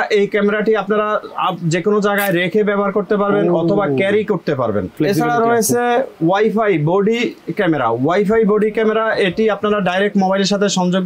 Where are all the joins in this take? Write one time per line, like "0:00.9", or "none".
0:04.9